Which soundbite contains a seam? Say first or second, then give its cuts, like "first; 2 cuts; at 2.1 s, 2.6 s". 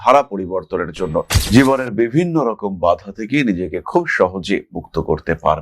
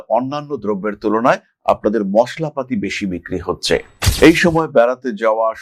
first; 1 cut; at 1.4 s